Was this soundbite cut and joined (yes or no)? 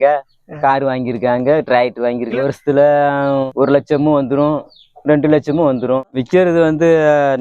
yes